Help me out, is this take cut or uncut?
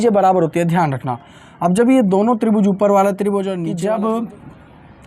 cut